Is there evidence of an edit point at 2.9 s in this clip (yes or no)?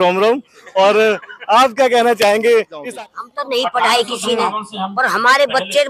yes